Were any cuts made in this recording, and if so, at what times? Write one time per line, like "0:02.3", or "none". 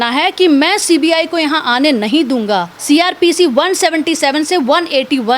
0:02.7